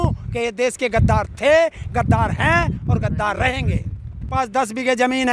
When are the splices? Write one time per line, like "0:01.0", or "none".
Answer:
0:04.3